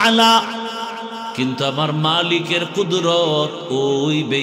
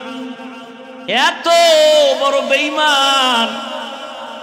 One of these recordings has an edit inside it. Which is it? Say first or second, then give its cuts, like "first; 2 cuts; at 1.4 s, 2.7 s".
first; 1 cut; at 1.3 s